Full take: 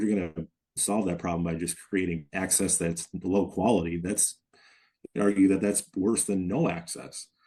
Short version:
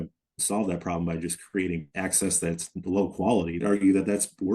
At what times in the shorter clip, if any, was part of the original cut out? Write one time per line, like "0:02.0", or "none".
0:03.6